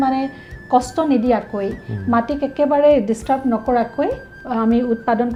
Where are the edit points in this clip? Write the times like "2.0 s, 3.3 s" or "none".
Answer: none